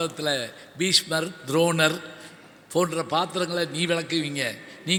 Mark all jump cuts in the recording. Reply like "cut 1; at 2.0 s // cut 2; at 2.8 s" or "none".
none